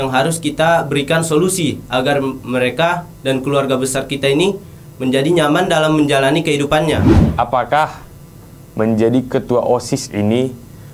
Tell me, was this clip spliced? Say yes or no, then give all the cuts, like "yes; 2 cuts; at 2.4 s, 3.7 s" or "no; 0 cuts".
yes; 1 cut; at 7.1 s